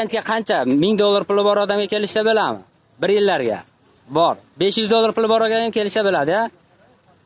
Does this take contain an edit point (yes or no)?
no